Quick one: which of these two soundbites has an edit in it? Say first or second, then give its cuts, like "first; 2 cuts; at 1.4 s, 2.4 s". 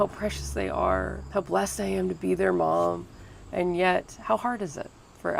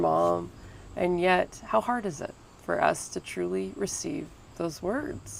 first; 1 cut; at 1.2 s